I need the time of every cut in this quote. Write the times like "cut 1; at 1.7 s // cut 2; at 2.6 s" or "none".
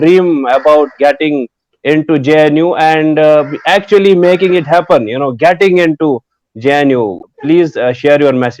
cut 1; at 7.2 s

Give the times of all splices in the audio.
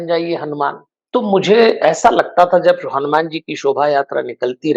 cut 1; at 0.9 s

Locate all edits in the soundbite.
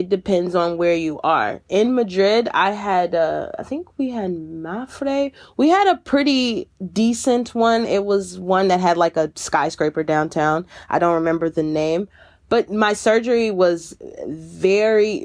none

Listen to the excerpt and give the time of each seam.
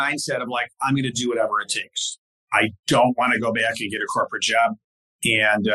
cut 1; at 2.0 s

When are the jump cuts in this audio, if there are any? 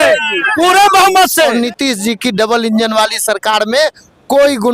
cut 1; at 1.5 s

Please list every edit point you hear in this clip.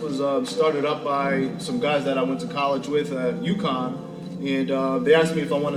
none

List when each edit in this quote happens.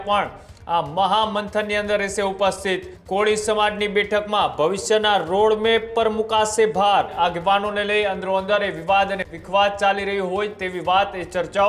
cut 1; at 2.9 s // cut 2; at 7.1 s

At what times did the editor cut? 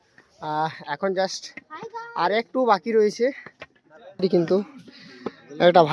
cut 1; at 4.2 s

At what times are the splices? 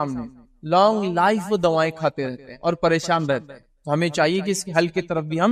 none

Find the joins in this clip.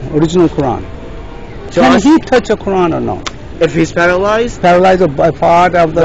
cut 1; at 1.7 s

